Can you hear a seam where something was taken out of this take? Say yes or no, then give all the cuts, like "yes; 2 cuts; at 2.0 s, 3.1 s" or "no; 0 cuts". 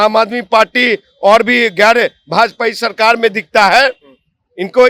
no; 0 cuts